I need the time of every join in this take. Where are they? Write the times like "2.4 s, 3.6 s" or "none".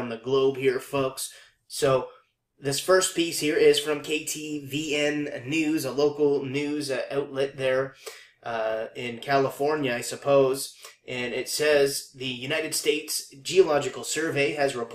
2.9 s